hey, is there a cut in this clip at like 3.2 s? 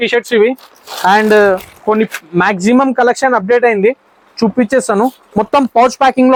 no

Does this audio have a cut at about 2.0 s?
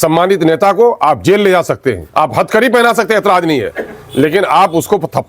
yes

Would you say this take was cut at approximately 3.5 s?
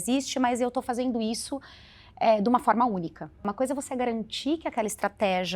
yes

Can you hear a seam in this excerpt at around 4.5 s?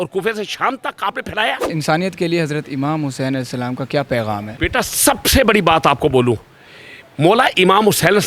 yes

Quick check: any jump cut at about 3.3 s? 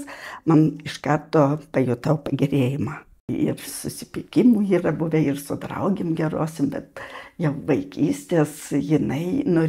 yes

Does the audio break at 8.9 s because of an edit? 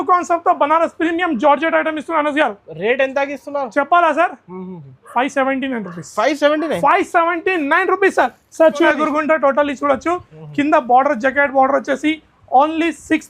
yes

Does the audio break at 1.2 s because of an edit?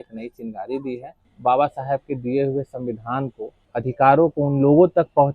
yes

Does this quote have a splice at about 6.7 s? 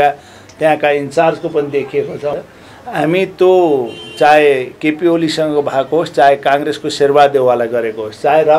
no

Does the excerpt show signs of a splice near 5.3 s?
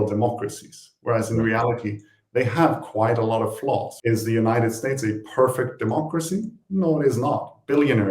no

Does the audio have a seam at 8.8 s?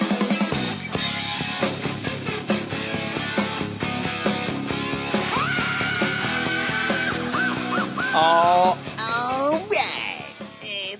no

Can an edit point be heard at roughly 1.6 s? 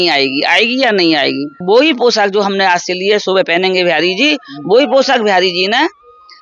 yes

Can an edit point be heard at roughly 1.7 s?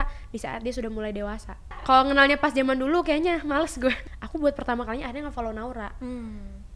yes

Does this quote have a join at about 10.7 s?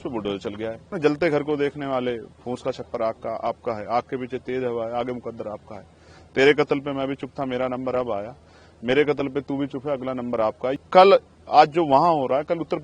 yes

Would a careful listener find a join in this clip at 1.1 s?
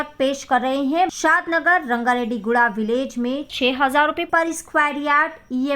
yes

